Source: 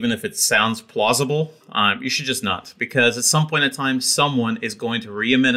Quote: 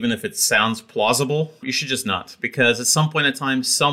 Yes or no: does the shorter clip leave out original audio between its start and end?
yes